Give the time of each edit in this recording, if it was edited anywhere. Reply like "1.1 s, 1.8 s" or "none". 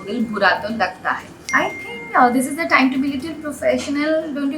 1.5 s